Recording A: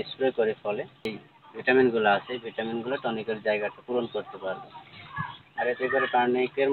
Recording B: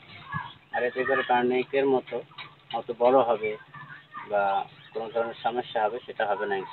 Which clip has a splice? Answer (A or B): A